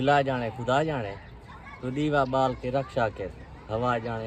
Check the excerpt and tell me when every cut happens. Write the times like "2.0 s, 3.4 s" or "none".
none